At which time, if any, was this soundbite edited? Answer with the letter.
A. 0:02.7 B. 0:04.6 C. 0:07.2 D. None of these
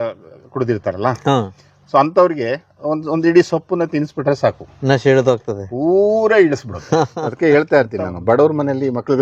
C